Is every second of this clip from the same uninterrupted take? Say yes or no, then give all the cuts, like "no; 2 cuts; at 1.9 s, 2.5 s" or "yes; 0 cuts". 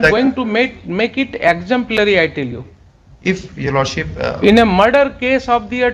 yes; 0 cuts